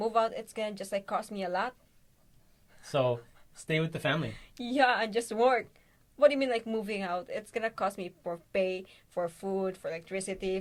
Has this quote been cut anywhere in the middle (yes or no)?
no